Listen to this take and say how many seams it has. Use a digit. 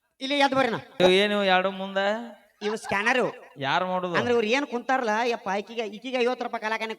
1